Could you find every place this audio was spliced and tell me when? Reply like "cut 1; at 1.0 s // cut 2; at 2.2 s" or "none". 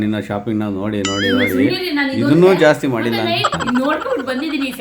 cut 1; at 3.5 s